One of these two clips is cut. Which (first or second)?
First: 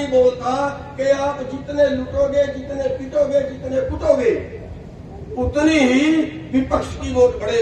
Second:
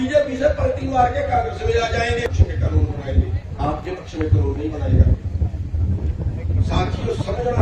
second